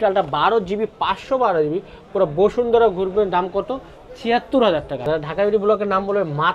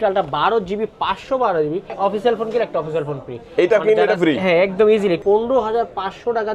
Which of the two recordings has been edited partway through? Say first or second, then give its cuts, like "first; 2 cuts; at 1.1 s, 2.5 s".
second; 2 cuts; at 2.0 s, 5.2 s